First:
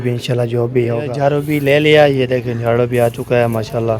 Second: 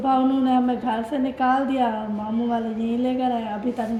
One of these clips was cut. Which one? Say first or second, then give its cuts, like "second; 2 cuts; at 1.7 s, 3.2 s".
first; 1 cut; at 1.0 s